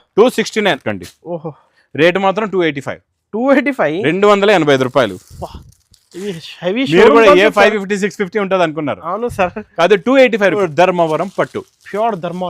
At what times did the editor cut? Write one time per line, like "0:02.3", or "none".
0:00.8
0:10.6